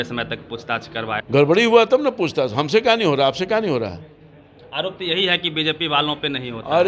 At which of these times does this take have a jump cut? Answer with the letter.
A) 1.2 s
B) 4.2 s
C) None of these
A